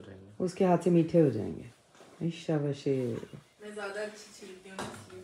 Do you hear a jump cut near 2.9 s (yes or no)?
no